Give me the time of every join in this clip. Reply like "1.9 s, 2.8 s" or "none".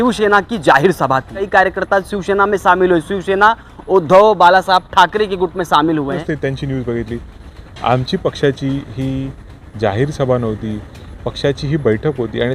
1.4 s, 6.3 s